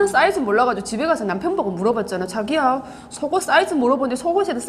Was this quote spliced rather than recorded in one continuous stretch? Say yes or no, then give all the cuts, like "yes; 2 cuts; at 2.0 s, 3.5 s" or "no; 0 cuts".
no; 0 cuts